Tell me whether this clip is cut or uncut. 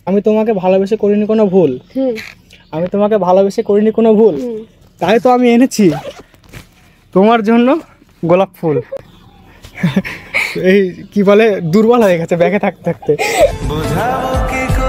uncut